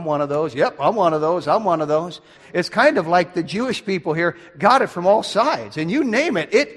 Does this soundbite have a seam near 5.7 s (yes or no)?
no